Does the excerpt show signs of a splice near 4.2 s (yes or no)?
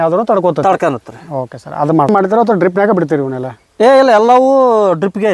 no